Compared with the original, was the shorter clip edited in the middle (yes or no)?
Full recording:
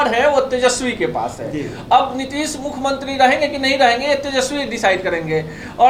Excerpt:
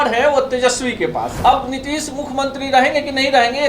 yes